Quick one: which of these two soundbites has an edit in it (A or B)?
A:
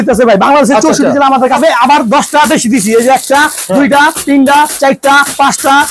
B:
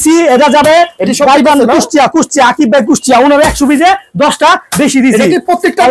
A